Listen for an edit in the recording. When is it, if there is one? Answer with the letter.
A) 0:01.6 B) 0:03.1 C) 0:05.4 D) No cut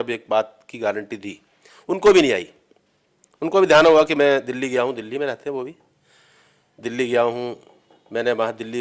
D